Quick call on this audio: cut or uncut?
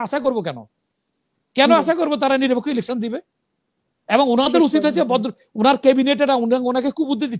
uncut